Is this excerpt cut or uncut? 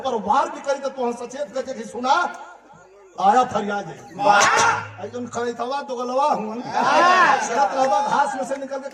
uncut